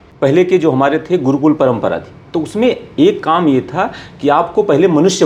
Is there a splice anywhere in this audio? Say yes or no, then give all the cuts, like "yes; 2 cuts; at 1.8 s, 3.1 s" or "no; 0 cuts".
no; 0 cuts